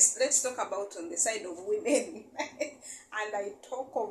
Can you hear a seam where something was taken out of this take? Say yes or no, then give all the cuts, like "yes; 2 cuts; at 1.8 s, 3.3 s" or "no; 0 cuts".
no; 0 cuts